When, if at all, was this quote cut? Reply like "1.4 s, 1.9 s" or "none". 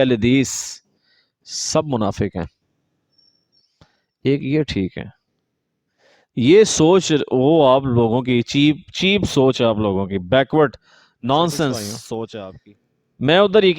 12.5 s